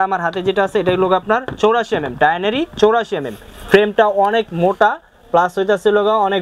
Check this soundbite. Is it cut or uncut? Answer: uncut